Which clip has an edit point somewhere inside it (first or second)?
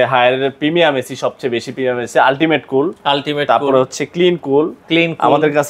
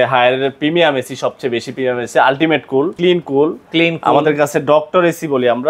second